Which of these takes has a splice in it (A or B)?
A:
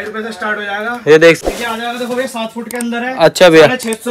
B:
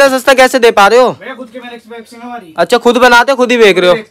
A